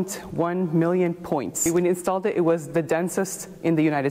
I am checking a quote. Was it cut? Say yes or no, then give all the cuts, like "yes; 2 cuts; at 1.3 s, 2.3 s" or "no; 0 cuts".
yes; 1 cut; at 1.6 s